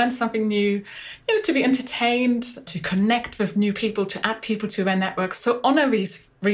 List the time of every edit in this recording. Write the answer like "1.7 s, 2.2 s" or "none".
2.7 s, 5.4 s